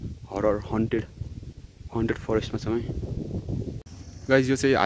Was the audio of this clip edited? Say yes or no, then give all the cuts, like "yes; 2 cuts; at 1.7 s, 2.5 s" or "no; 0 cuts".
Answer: yes; 1 cut; at 3.8 s